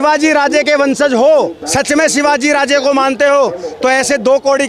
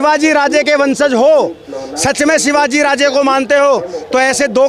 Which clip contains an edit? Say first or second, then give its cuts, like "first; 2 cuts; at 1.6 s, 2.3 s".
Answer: first; 1 cut; at 1.6 s